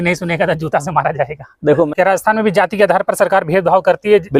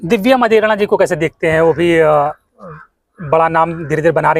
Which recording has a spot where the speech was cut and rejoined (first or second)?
first